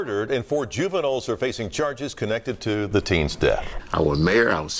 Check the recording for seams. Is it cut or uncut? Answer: cut